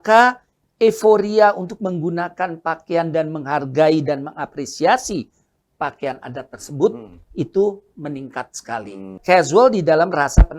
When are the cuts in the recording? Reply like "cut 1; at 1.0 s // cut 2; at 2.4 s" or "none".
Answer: cut 1; at 9.2 s